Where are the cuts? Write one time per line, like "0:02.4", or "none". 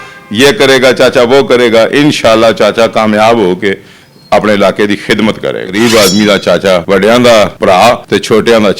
0:05.7
0:06.8
0:07.9